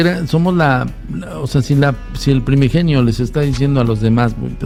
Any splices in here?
no; 0 cuts

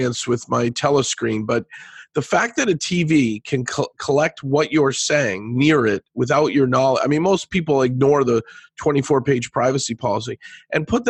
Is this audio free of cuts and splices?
yes; 0 cuts

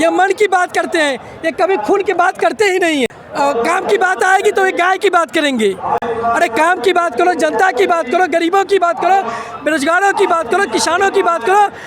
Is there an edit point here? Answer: no; 0 cuts

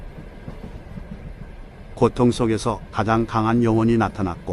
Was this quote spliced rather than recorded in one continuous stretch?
no; 0 cuts

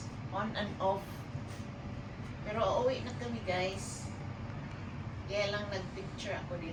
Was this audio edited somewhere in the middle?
no; 0 cuts

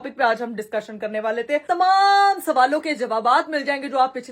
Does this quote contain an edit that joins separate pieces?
yes; 1 cut; at 1.6 s

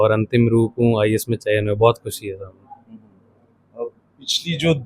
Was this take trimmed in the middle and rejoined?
no; 0 cuts

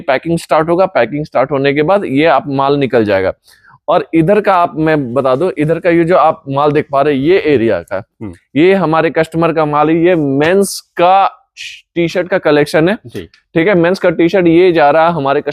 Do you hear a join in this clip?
no; 0 cuts

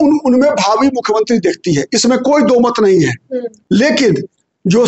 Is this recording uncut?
no; 1 cut; at 3.5 s

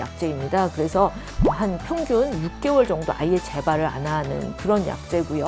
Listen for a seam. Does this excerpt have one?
yes; 1 cut; at 1.3 s

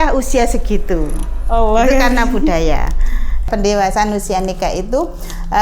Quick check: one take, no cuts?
no; 1 cut; at 3.5 s

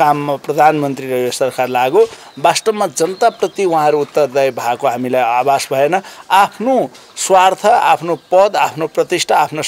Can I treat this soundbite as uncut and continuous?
yes; 0 cuts

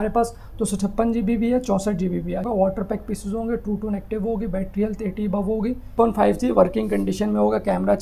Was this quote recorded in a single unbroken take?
no; 2 cuts; at 2.4 s, 5.9 s

